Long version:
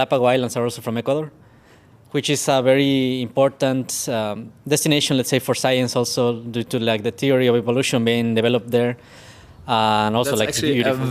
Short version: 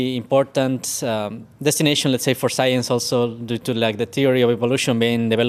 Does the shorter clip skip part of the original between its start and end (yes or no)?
no